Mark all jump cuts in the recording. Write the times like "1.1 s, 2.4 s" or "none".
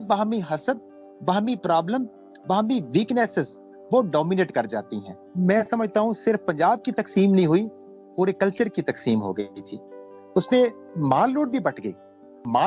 5.2 s